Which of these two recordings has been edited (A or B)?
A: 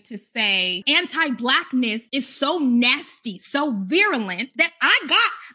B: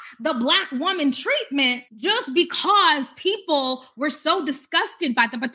A